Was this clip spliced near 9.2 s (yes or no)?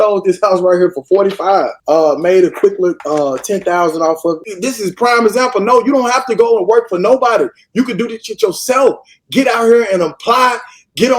no